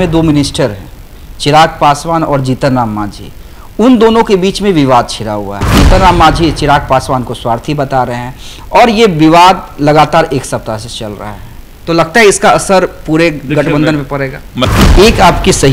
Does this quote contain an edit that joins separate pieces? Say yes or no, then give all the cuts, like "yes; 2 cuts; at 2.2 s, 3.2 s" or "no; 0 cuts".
yes; 2 cuts; at 5.8 s, 14.7 s